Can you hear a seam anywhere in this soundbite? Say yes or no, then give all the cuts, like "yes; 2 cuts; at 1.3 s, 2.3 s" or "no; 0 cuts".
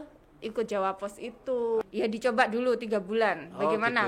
yes; 1 cut; at 1.8 s